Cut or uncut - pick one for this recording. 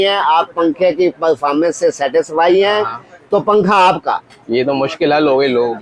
uncut